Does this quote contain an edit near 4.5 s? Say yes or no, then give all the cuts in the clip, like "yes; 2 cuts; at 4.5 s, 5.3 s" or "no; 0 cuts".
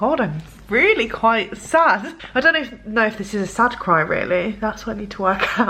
no; 1 cut; at 2.2 s